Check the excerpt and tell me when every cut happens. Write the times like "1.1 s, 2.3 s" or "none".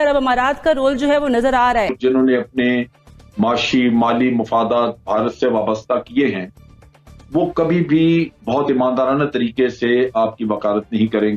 2.0 s

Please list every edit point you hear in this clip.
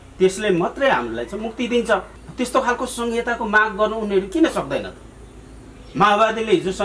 none

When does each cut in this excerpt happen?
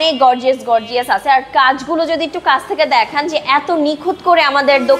none

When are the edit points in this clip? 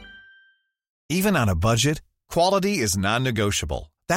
none

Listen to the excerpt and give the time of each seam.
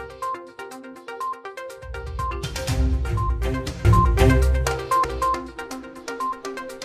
3.7 s

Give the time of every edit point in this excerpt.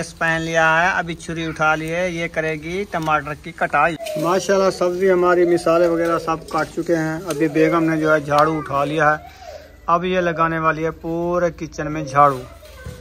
4.0 s

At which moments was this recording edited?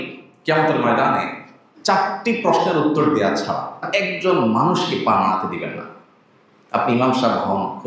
3.9 s

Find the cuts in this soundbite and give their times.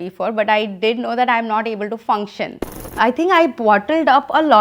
2.8 s

